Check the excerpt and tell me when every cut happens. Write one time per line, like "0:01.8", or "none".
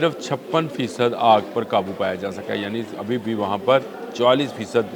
0:04.0